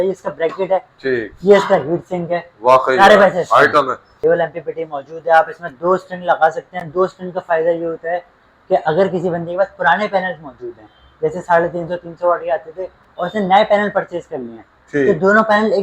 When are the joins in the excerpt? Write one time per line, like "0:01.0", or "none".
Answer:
0:04.1